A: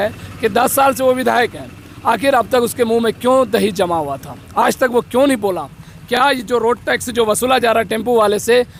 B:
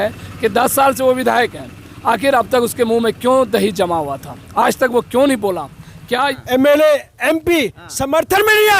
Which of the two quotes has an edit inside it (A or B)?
B